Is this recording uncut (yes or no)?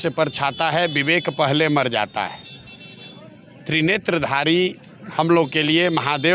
yes